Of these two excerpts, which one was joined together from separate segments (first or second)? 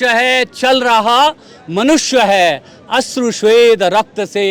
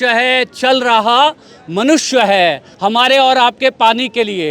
second